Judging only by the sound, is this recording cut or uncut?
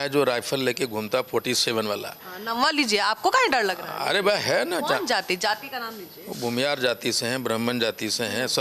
uncut